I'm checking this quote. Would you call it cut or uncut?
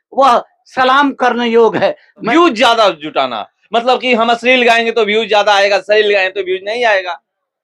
cut